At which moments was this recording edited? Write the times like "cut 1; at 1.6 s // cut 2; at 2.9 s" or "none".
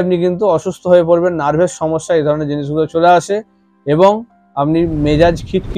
none